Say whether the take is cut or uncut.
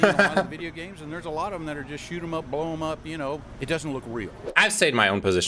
cut